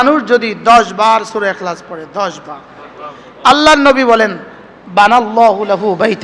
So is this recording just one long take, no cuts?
yes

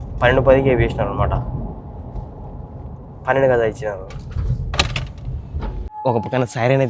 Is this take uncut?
no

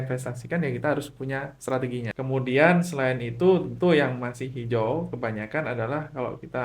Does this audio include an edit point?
yes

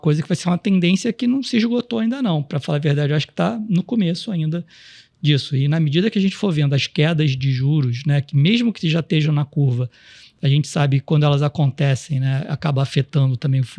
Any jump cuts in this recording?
no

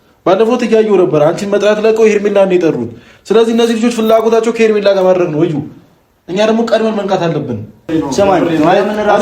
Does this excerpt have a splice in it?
yes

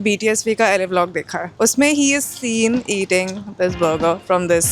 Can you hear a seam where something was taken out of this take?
yes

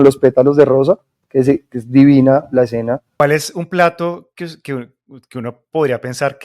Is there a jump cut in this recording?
yes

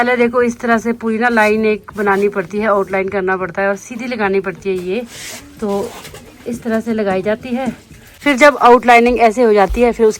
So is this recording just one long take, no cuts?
yes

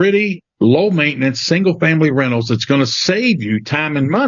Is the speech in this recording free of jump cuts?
yes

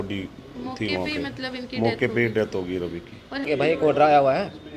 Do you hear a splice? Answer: yes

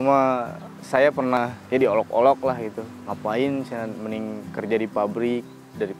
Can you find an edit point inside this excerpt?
yes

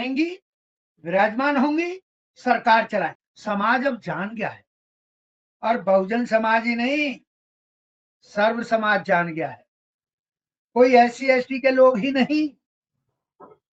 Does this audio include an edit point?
yes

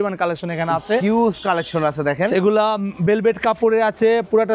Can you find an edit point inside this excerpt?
no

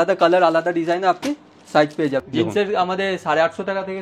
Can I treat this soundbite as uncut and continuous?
no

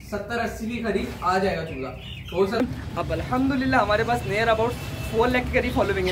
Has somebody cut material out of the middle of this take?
yes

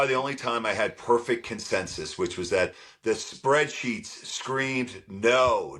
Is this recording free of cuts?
yes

